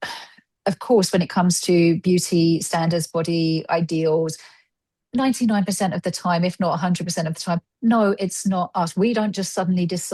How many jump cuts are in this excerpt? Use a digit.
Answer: 0